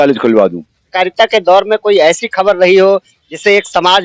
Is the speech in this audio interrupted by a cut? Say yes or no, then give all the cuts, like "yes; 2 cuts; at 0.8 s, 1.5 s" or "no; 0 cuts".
yes; 1 cut; at 0.9 s